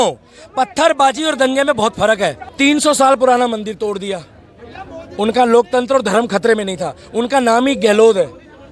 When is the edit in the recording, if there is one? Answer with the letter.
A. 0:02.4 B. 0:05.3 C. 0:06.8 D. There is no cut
A